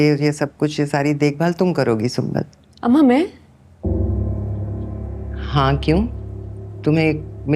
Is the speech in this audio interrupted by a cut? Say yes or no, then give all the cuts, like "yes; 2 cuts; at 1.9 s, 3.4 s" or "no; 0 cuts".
yes; 1 cut; at 2.6 s